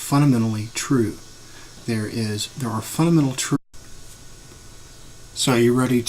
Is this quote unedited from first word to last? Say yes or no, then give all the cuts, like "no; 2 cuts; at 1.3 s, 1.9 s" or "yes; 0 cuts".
yes; 0 cuts